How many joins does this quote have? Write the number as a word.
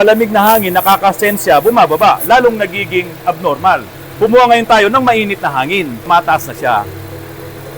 two